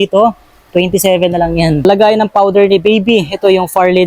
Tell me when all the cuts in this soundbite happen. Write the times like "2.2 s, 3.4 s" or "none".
1.8 s